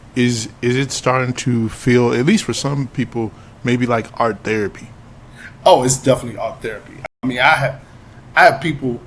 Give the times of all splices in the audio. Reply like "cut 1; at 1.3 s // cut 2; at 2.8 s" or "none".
cut 1; at 7.1 s